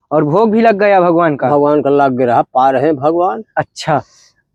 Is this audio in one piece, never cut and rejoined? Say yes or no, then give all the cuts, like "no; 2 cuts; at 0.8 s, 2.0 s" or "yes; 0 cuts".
yes; 0 cuts